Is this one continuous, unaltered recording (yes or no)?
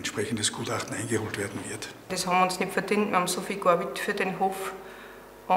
no